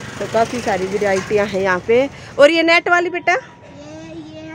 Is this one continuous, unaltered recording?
yes; 0 cuts

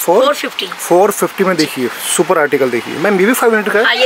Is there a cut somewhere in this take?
yes; 1 cut; at 2.9 s

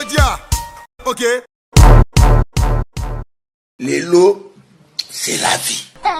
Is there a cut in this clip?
no; 0 cuts

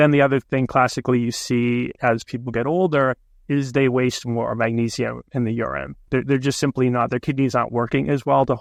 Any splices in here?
no; 0 cuts

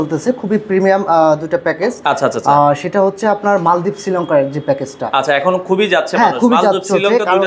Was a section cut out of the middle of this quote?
no; 0 cuts

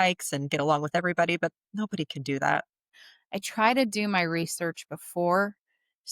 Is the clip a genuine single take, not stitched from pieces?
no; 1 cut; at 2.9 s

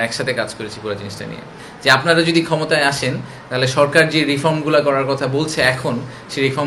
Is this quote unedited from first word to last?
no; 1 cut; at 1.6 s

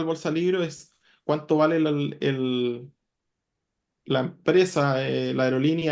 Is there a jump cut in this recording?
no; 0 cuts

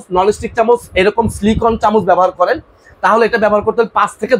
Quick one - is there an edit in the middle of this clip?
no; 0 cuts

